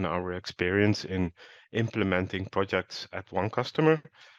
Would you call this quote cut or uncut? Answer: uncut